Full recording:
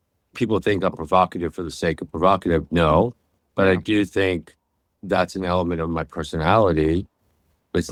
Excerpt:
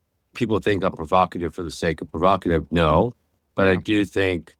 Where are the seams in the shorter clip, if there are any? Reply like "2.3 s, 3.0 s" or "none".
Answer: none